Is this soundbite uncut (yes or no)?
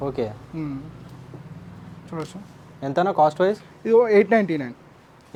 yes